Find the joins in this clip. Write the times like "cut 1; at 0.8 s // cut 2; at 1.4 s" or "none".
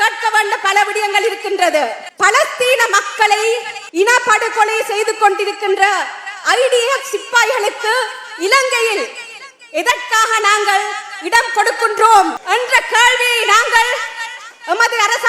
cut 1; at 2.0 s // cut 2; at 3.8 s // cut 3; at 12.4 s